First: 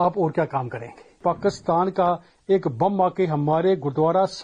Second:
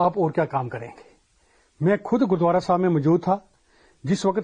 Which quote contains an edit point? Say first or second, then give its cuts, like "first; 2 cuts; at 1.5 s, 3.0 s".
first; 1 cut; at 1.2 s